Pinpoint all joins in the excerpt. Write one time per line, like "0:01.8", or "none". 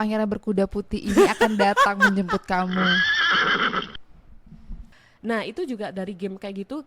0:04.9